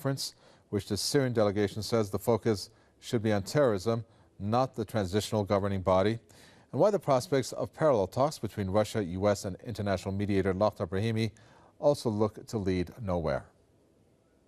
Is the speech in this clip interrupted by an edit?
yes; 1 cut; at 12.9 s

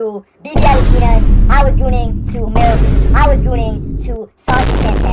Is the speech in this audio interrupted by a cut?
no; 0 cuts

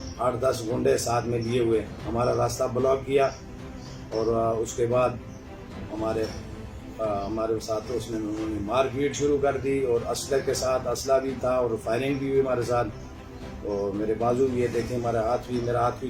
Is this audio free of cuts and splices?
yes; 0 cuts

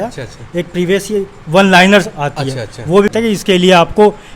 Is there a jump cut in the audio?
yes; 1 cut; at 3.1 s

